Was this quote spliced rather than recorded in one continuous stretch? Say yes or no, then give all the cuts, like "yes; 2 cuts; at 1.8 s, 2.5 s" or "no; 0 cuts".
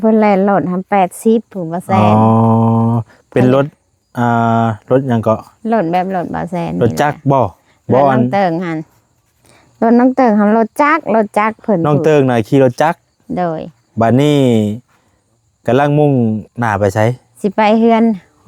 no; 0 cuts